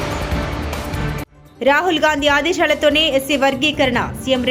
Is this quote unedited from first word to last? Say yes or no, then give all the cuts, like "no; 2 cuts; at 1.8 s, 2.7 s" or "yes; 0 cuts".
no; 1 cut; at 1.4 s